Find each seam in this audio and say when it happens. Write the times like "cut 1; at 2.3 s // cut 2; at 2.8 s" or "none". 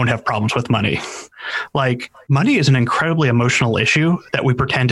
cut 1; at 2.1 s